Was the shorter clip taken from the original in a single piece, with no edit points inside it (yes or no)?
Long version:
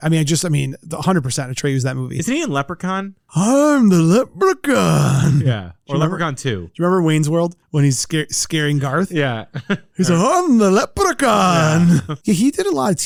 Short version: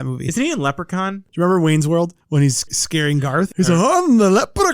no